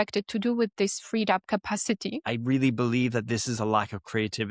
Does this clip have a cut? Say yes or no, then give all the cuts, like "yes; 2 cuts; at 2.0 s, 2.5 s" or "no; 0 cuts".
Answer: yes; 1 cut; at 2.3 s